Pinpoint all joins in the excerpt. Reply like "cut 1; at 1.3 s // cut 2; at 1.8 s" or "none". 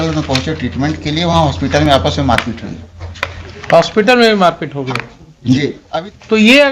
cut 1; at 5.8 s